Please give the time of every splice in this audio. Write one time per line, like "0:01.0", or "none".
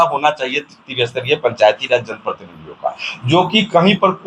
none

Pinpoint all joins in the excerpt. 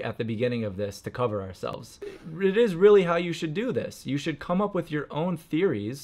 0:01.9

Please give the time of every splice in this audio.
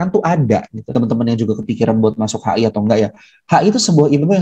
0:00.9

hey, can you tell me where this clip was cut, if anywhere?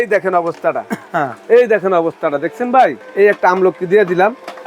0:03.0

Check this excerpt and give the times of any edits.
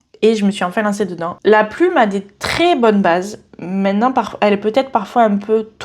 0:01.4

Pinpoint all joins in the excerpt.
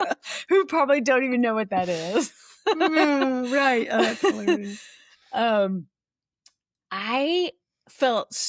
none

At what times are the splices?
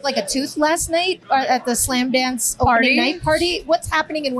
0:01.2

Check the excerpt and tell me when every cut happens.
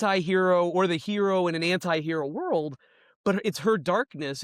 none

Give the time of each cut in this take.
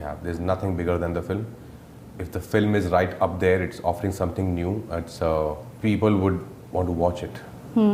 none

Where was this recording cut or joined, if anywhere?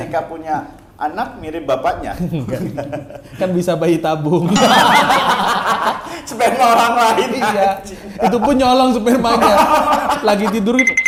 none

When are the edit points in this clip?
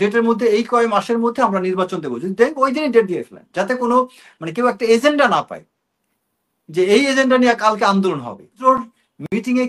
0:08.6

